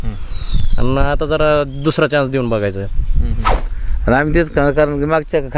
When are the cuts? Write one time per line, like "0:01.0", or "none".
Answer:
0:03.7